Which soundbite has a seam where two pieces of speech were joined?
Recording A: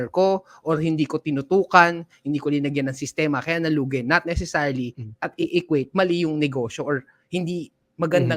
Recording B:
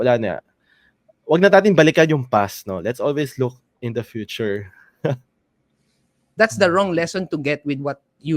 B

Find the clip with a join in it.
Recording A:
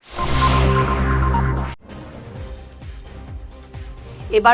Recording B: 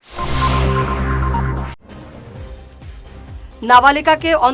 A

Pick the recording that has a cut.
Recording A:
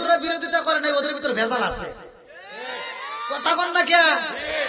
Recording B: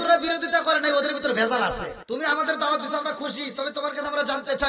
B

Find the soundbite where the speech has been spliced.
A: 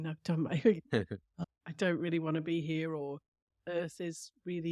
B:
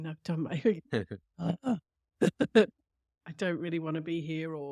A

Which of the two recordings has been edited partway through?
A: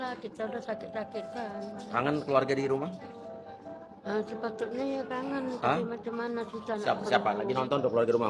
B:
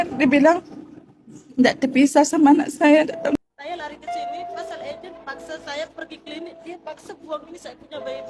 B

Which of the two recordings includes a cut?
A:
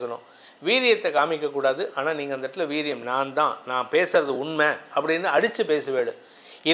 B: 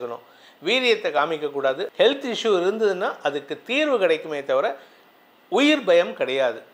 B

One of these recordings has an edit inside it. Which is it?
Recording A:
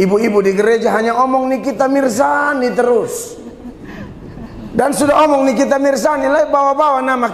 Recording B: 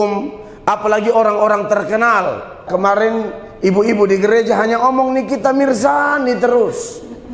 B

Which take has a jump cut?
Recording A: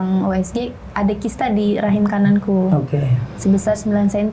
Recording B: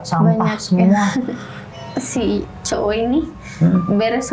B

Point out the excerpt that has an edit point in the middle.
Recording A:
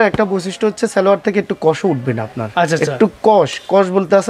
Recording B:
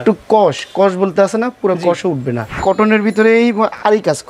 B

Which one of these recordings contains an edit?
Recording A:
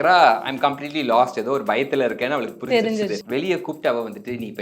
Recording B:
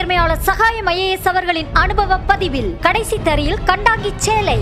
A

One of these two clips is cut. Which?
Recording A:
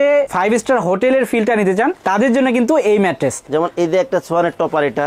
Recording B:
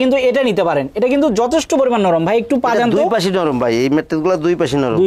A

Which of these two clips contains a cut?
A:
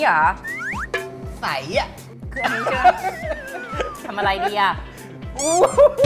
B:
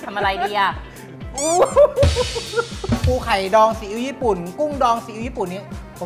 B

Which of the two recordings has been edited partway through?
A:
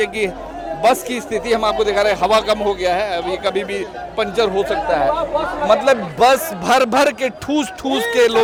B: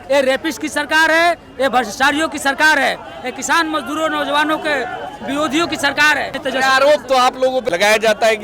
B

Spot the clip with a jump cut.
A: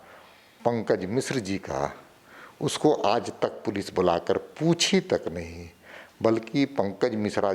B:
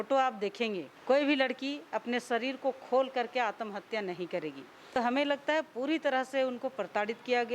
B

